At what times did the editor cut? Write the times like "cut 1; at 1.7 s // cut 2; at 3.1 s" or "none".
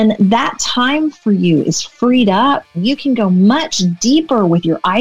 cut 1; at 2.7 s